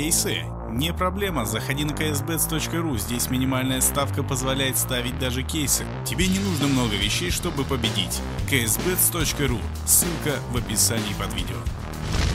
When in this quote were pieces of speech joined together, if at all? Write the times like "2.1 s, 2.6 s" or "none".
none